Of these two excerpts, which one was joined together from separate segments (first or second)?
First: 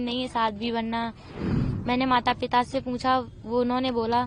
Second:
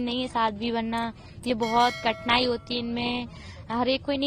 first